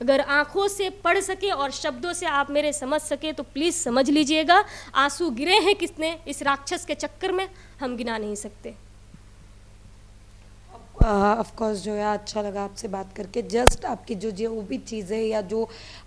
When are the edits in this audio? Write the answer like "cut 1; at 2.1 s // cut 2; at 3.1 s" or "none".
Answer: none